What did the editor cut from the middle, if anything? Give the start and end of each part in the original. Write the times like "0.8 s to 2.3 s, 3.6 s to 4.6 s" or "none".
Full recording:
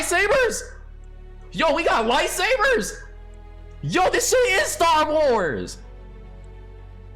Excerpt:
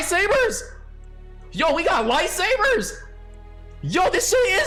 none

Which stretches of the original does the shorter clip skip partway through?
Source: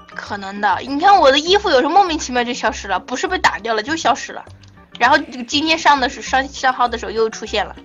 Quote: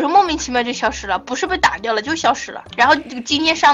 4.4 s to 4.8 s

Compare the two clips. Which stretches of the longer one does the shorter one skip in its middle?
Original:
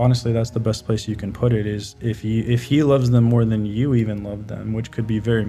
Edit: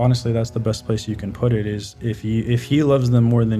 none

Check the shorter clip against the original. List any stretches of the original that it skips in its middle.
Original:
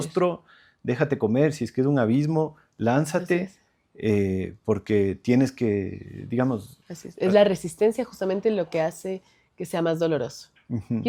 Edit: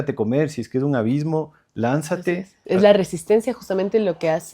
3.6 s to 7.0 s

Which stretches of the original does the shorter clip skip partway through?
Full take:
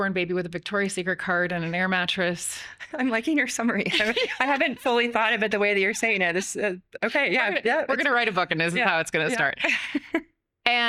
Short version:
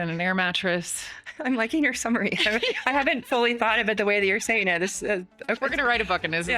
7.1 s to 7.8 s

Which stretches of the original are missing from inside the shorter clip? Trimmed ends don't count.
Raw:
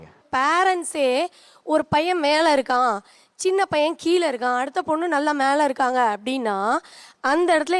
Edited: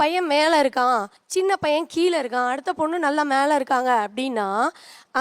3.1 s to 3.3 s

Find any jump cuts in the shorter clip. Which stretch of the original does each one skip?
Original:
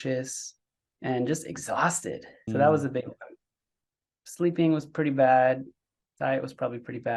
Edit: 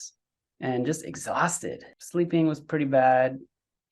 2.3 s to 4.2 s

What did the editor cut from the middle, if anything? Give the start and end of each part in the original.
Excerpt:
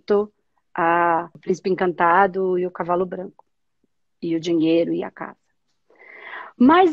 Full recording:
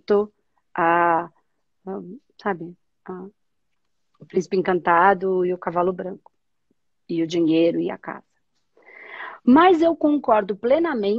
1.3 s to 4.2 s

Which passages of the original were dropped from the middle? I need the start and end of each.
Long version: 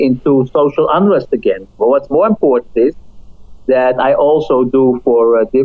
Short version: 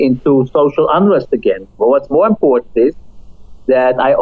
none

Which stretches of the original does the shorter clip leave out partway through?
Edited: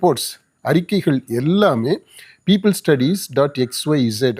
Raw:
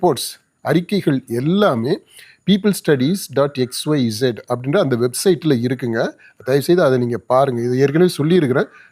none

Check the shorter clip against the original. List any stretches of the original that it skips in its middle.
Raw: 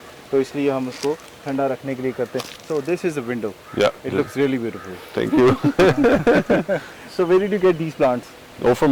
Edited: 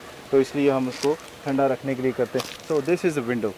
none

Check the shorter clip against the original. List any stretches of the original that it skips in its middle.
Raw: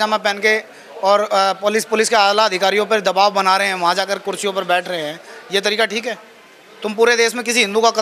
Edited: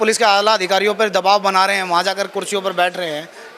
none

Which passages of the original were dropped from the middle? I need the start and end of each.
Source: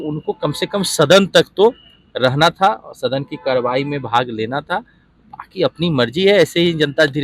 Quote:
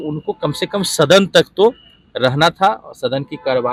none

